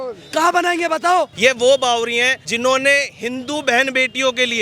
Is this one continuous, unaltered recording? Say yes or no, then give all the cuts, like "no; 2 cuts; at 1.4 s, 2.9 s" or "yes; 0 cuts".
no; 2 cuts; at 1.3 s, 2.4 s